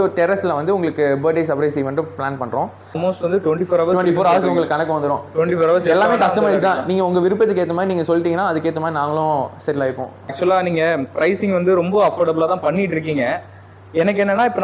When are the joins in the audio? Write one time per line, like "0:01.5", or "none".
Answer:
0:03.0
0:10.3